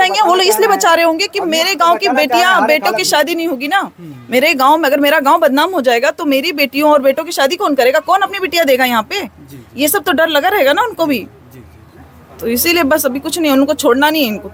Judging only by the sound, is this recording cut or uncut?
uncut